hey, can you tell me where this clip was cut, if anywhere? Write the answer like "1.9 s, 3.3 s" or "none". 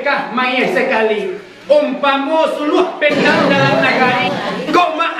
4.2 s

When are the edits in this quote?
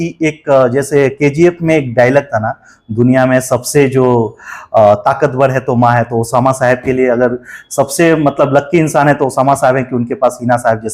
none

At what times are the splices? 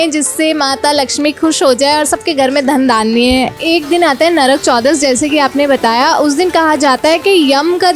3.6 s

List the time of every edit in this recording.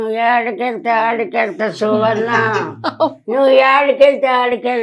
none

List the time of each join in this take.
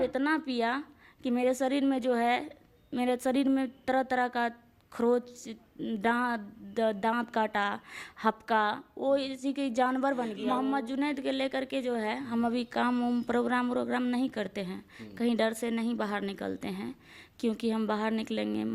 10.4 s

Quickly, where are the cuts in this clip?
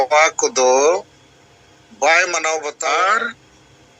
2.7 s

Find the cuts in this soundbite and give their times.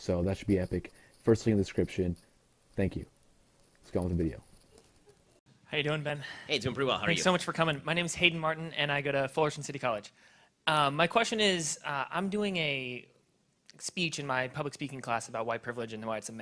none

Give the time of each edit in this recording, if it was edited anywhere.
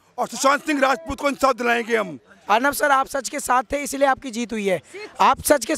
2.3 s

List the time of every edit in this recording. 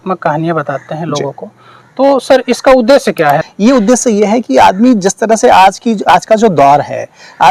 3.5 s

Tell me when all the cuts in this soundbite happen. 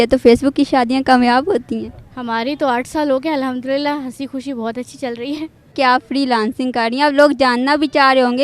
5.7 s

